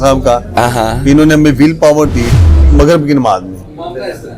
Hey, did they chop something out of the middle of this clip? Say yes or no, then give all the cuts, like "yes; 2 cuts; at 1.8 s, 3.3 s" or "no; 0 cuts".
yes; 1 cut; at 2.6 s